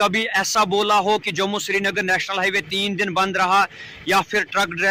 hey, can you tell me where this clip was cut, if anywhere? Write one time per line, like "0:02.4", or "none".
none